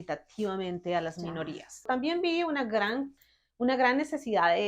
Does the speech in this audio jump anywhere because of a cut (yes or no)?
yes